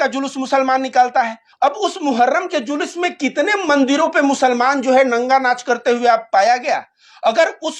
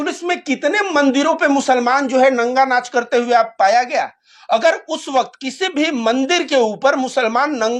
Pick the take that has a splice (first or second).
first